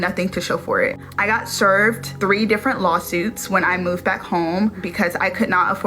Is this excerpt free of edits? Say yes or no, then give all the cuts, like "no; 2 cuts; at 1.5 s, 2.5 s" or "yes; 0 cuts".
yes; 0 cuts